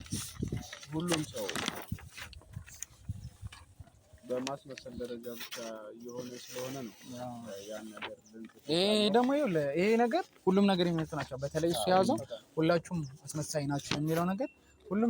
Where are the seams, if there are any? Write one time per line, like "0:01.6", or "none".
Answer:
none